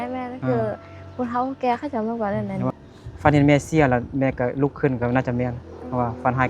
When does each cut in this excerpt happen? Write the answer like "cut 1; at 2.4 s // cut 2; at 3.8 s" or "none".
cut 1; at 2.8 s